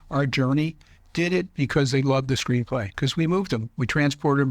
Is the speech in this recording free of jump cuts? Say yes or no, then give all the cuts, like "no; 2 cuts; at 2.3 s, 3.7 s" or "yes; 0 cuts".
no; 1 cut; at 2.9 s